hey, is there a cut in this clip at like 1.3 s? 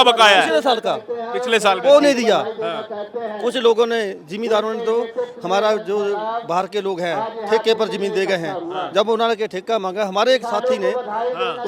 no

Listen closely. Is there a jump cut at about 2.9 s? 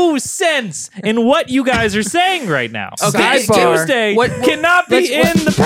yes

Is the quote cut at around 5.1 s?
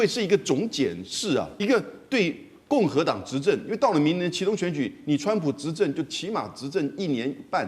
no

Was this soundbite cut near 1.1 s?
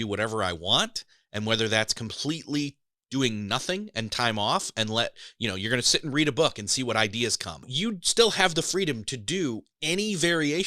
no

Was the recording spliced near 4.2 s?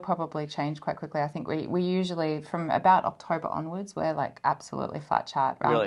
no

